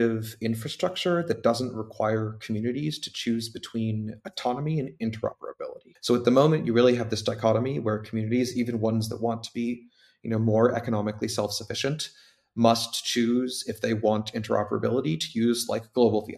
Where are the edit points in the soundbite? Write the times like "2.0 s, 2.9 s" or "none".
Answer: 5.9 s